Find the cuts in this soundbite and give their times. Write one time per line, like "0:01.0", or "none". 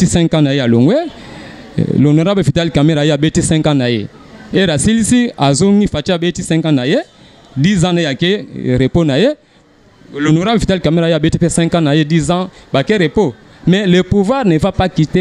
none